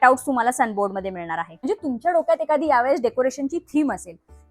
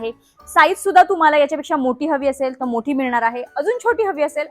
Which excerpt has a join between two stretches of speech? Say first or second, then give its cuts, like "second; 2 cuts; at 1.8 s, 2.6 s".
first; 1 cut; at 1.5 s